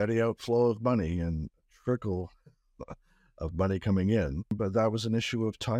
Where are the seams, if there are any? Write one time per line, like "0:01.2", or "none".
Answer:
0:04.6